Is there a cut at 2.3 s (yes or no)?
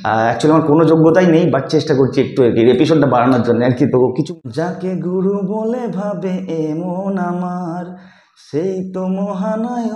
no